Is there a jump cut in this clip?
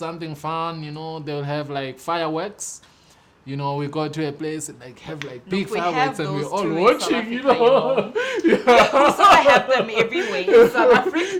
no; 0 cuts

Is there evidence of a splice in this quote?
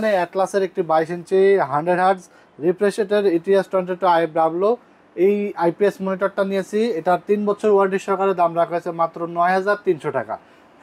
no; 0 cuts

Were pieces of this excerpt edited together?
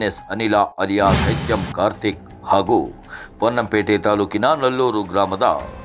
yes; 1 cut; at 1.3 s

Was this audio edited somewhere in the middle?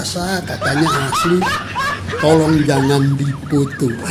no; 0 cuts

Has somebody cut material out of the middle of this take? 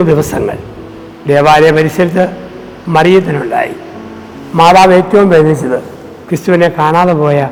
no; 0 cuts

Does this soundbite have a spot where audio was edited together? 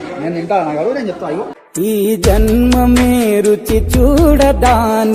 no; 0 cuts

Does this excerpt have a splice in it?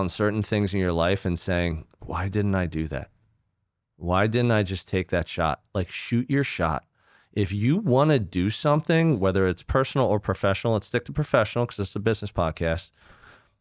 no; 0 cuts

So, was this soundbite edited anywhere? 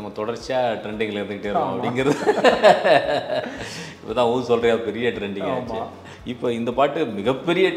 yes; 1 cut; at 6.0 s

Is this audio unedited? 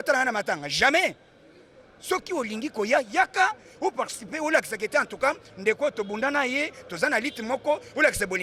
yes; 0 cuts

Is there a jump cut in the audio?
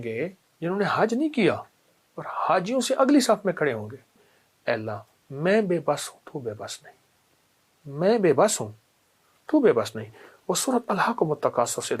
yes; 1 cut; at 4.3 s

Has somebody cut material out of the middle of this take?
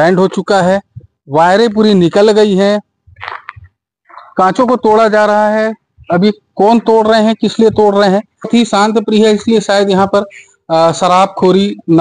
yes; 1 cut; at 8.5 s

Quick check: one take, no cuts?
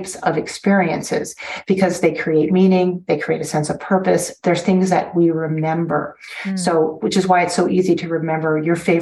yes; 0 cuts

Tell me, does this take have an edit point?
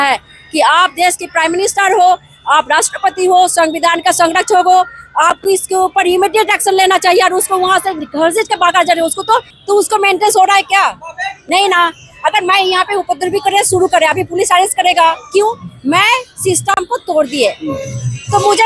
yes; 1 cut; at 9.5 s

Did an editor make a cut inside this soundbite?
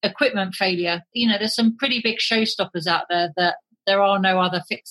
yes; 1 cut; at 1.0 s

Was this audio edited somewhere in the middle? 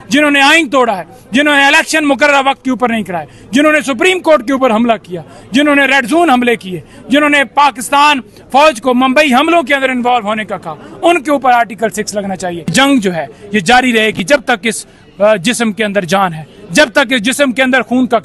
yes; 1 cut; at 12.7 s

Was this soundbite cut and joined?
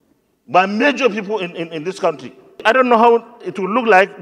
yes; 1 cut; at 2.6 s

